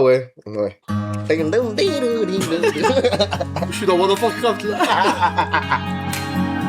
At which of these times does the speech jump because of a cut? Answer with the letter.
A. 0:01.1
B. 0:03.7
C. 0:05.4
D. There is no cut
B